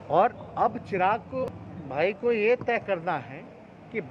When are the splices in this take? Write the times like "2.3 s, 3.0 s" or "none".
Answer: 1.5 s